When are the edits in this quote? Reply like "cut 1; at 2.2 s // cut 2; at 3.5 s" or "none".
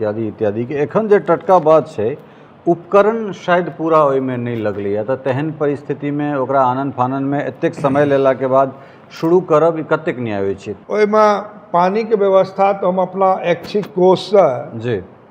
cut 1; at 10.7 s